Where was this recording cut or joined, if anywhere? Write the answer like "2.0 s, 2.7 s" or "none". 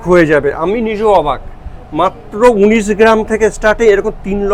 none

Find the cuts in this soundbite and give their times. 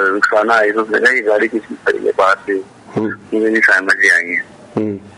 none

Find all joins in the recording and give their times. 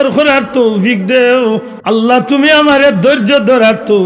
1.7 s

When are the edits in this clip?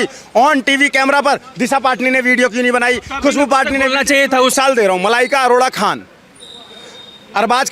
4.5 s

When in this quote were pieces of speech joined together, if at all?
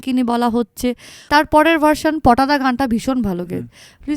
1.1 s

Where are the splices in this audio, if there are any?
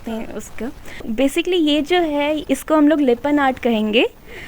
1.1 s

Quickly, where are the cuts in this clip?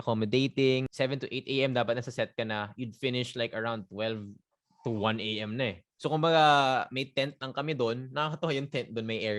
0.9 s, 5.9 s

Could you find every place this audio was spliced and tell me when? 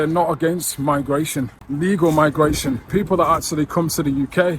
1.6 s

